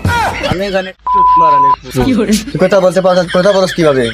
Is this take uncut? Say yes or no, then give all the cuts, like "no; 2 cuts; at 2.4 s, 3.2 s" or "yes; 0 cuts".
no; 1 cut; at 0.9 s